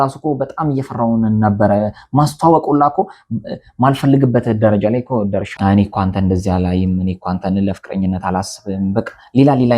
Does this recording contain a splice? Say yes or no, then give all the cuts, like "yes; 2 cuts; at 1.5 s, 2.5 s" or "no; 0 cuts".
yes; 1 cut; at 5.5 s